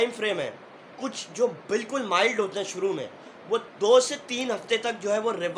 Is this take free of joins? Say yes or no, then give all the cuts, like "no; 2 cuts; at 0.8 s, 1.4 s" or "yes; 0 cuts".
yes; 0 cuts